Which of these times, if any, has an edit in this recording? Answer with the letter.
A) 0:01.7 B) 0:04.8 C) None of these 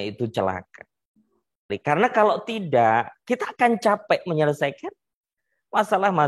A